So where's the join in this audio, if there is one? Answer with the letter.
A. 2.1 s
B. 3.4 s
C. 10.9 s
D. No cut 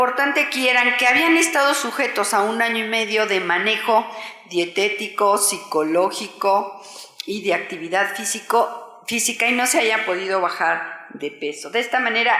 B